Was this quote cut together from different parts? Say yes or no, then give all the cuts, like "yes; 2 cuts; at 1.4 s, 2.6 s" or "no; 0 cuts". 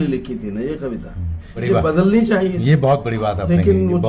yes; 1 cut; at 1.6 s